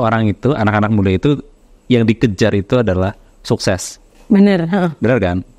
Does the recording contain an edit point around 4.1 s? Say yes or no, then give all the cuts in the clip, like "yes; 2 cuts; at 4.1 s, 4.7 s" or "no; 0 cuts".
no; 0 cuts